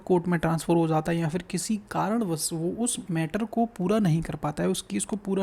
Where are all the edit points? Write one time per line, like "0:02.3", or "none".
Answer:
none